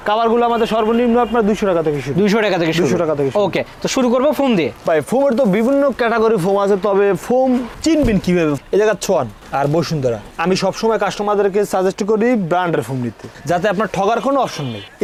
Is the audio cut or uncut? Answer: uncut